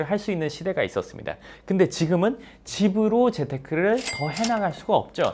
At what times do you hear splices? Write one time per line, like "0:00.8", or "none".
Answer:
none